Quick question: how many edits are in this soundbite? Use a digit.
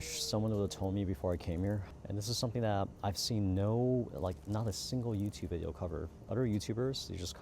1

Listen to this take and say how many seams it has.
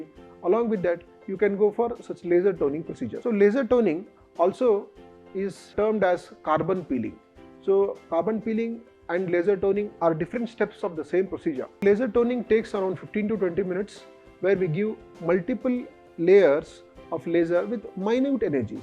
1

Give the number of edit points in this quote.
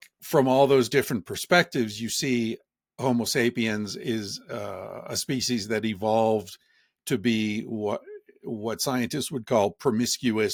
0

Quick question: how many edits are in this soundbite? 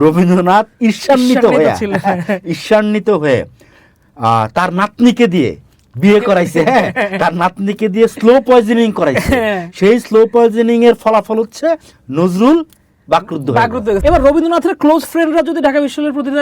1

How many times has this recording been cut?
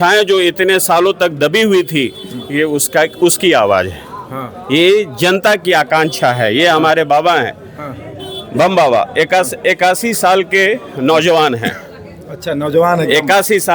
0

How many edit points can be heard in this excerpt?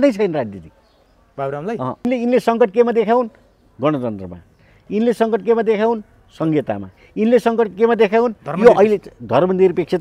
1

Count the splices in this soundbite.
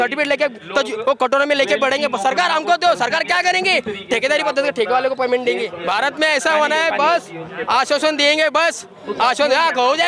1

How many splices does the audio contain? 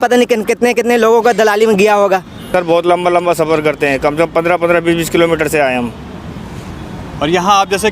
1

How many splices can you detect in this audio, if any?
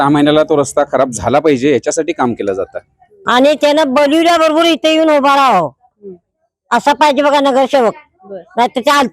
1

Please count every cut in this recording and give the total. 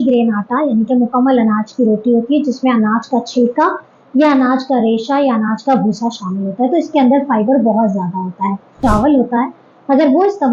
1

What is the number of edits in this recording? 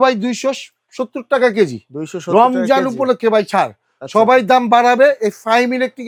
0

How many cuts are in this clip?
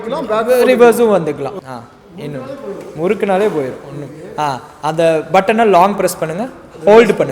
1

